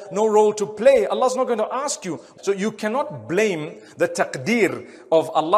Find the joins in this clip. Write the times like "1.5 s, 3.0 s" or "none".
2.3 s